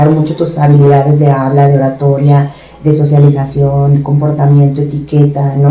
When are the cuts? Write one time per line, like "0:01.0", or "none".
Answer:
none